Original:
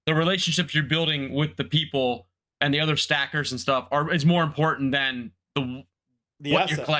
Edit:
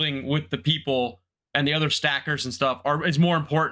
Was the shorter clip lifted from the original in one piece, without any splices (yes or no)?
yes